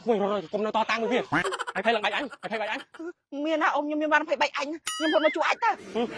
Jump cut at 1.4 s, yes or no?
yes